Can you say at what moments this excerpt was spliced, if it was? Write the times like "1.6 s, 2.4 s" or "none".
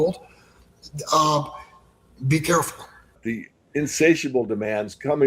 3.2 s